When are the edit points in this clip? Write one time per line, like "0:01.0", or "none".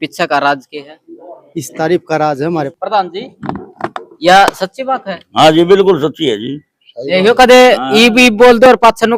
0:02.7